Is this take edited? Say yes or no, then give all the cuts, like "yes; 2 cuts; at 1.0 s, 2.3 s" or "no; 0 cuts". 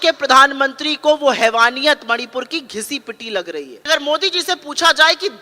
yes; 1 cut; at 3.9 s